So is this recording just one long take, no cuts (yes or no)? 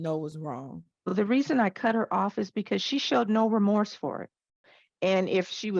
no